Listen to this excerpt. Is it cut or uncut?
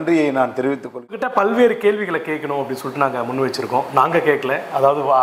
cut